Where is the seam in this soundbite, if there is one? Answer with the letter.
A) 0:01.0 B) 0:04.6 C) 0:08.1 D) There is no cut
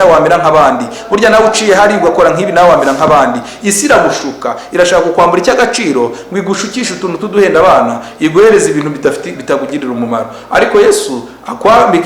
D